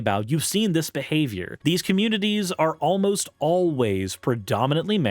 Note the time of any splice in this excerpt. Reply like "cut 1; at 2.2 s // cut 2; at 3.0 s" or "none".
cut 1; at 1.5 s